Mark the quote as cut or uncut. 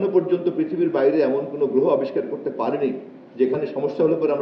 uncut